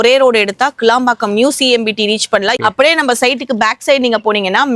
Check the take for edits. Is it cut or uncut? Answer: cut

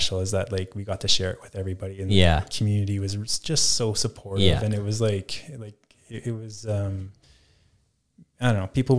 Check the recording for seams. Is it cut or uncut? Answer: uncut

